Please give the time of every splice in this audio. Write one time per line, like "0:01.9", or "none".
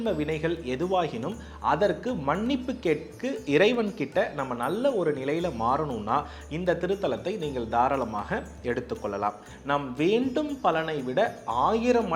0:09.5